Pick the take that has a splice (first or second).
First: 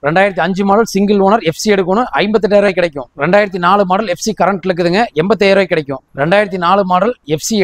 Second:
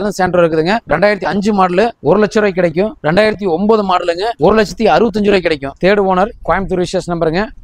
second